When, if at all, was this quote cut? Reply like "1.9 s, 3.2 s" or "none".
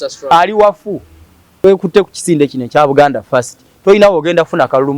1.6 s